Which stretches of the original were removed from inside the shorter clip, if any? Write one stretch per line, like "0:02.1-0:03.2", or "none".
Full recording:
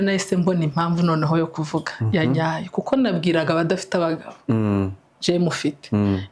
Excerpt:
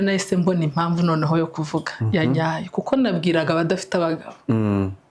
none